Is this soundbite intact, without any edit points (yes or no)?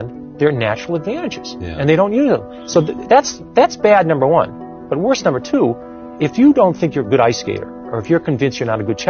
yes